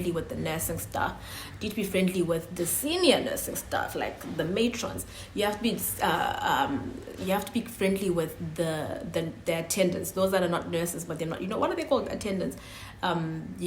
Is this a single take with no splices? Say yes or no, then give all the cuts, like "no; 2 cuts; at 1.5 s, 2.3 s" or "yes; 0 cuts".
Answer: yes; 0 cuts